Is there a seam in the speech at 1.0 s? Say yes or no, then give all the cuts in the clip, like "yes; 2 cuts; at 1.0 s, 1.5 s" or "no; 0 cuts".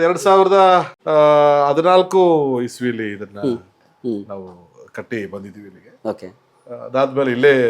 yes; 1 cut; at 1.0 s